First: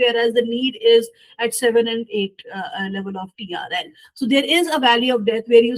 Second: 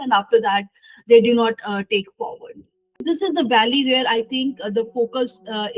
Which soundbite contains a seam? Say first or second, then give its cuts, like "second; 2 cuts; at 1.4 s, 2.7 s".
second; 1 cut; at 2.9 s